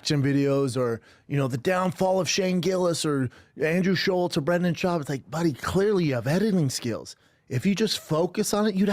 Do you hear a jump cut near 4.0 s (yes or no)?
yes